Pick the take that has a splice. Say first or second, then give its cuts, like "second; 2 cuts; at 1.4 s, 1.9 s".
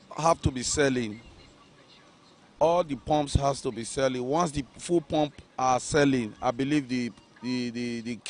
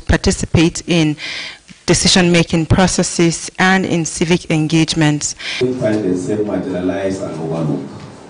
second; 1 cut; at 5.5 s